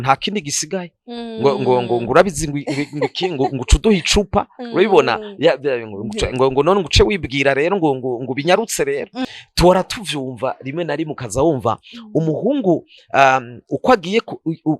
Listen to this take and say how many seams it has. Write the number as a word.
one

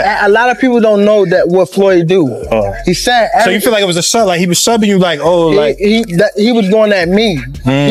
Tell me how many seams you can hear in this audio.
zero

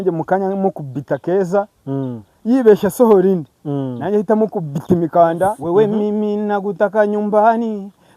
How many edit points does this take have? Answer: one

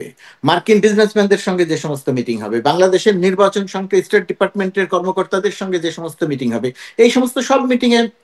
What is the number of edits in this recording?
zero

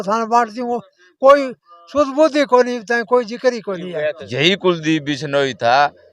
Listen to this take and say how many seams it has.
one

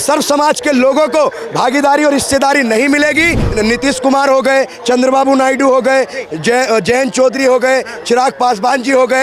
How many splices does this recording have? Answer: one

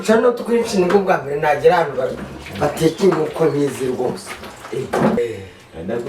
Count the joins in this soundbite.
one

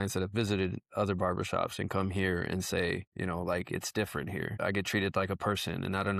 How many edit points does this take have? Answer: zero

